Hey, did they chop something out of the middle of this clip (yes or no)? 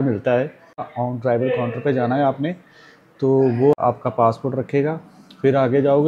yes